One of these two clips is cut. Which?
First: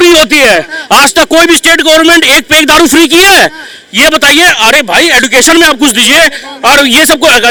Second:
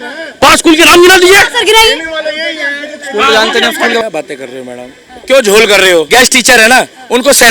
second; 2 cuts; at 4.0 s, 6.1 s

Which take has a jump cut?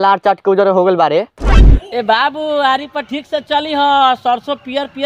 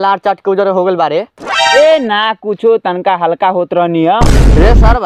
first; 1 cut; at 1.5 s

